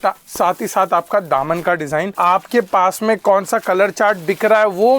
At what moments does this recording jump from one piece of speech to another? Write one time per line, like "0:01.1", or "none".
0:02.1